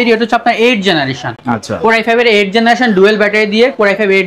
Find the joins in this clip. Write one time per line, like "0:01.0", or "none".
none